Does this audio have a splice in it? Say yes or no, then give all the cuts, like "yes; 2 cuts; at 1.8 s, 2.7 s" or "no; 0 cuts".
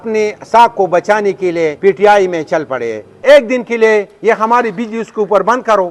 yes; 2 cuts; at 1.8 s, 3.2 s